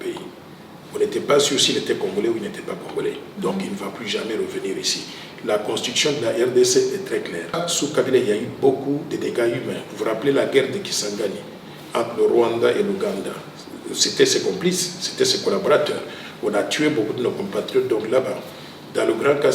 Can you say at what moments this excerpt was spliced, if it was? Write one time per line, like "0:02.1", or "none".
0:07.7